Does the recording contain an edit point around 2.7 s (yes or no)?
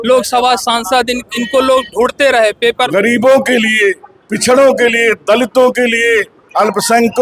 yes